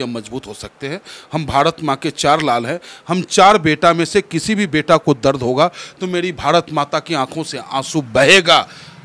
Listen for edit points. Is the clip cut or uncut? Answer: uncut